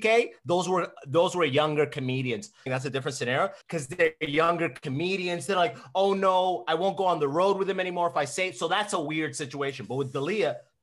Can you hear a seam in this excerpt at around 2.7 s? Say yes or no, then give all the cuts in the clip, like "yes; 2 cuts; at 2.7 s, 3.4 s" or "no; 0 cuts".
yes; 2 cuts; at 2.7 s, 3.6 s